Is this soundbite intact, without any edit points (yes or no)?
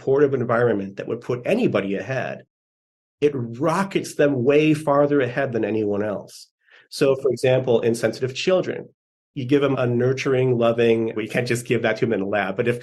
no